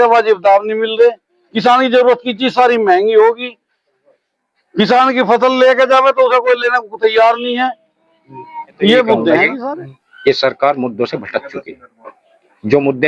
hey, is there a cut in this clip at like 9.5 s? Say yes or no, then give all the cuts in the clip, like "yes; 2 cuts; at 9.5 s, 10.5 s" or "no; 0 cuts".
yes; 1 cut; at 9.5 s